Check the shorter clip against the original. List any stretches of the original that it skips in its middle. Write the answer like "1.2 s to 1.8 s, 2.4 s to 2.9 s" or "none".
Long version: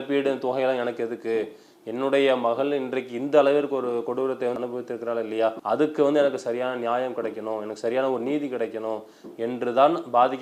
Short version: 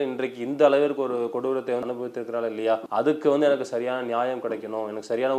none